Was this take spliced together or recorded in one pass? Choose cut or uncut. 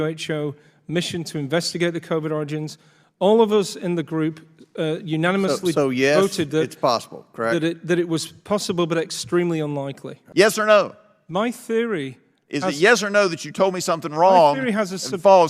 cut